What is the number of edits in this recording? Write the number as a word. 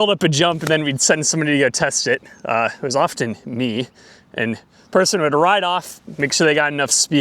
one